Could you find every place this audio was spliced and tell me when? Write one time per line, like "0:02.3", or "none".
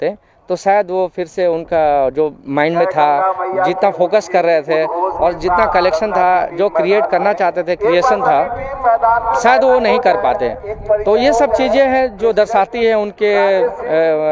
none

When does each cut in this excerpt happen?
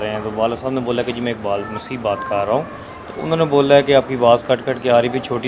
none

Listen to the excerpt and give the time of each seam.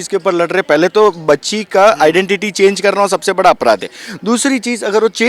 none

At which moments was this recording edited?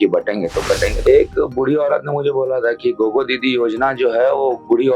0:01.0

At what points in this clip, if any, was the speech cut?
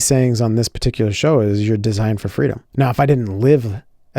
0:02.6

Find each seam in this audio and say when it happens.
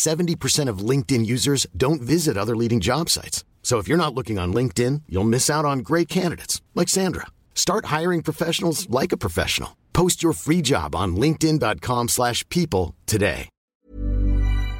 0:13.8

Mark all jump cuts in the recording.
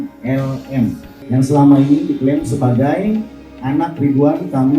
0:01.1

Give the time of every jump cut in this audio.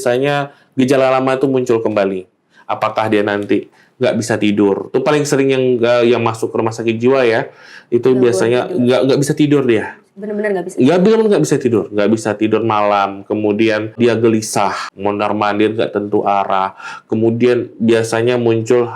0:14.0
0:14.9

